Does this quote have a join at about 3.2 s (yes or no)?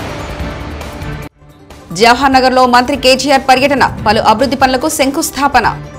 no